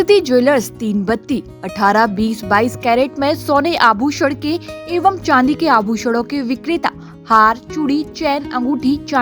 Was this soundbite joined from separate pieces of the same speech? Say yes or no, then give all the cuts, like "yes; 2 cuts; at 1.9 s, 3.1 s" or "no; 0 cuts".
no; 0 cuts